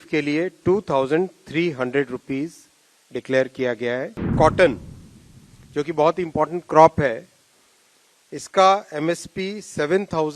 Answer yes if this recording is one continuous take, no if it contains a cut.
no